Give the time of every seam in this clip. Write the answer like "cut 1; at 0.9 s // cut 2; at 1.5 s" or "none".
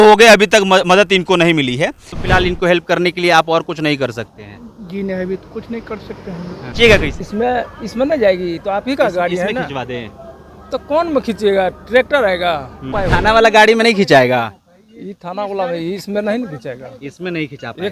cut 1; at 2.1 s // cut 2; at 6.6 s // cut 3; at 12.9 s